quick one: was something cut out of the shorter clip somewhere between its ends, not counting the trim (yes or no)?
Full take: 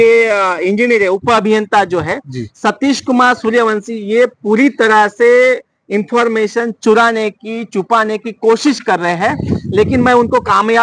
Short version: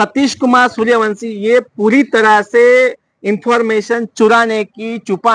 no